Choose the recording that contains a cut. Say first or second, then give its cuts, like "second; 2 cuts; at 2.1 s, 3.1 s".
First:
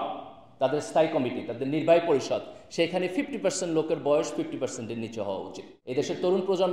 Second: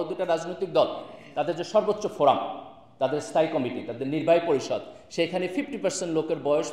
first; 1 cut; at 5.7 s